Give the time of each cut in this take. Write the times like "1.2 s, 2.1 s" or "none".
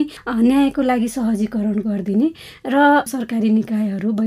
3.1 s